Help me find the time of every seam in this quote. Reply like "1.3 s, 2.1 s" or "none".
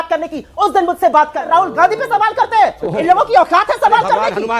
1.4 s